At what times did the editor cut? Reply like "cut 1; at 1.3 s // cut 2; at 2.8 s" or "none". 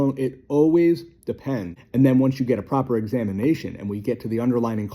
cut 1; at 1.7 s